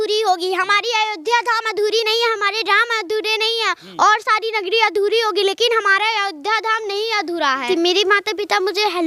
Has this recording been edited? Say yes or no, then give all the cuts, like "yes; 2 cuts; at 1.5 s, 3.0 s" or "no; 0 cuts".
yes; 1 cut; at 7.6 s